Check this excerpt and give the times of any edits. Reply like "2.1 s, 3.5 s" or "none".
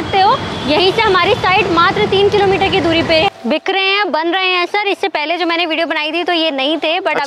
3.3 s